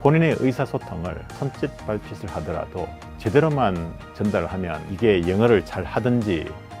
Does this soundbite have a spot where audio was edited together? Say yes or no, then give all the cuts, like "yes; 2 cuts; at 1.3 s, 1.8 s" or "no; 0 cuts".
no; 0 cuts